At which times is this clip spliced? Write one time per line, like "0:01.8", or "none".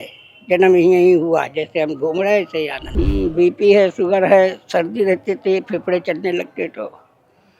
0:02.8